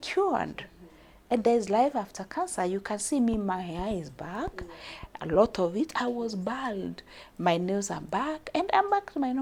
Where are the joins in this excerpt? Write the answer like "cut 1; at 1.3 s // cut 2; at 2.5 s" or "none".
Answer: none